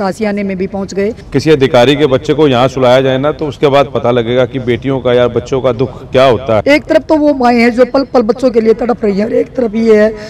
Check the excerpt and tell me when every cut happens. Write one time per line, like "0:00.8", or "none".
0:01.2
0:06.6